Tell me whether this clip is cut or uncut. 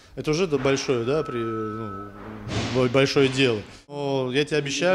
cut